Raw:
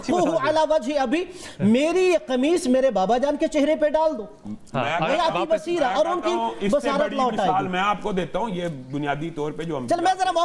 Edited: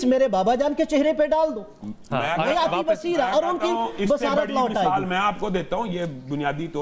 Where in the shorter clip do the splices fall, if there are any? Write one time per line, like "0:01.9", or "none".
none